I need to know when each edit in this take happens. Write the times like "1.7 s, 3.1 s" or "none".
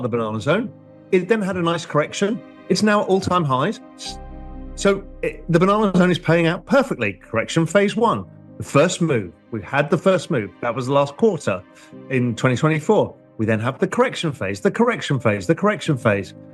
none